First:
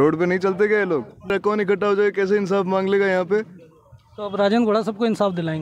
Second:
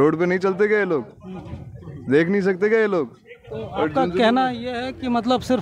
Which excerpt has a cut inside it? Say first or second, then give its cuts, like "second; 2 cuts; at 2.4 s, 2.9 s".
first; 1 cut; at 1.3 s